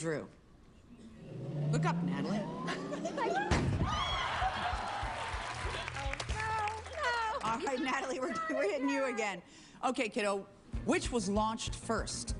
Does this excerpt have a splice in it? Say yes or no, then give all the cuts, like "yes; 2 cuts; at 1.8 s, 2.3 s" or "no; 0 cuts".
no; 0 cuts